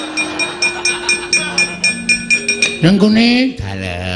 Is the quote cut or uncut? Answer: uncut